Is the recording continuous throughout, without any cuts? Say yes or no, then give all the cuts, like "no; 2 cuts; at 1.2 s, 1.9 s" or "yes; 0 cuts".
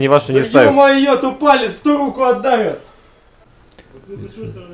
no; 1 cut; at 3.4 s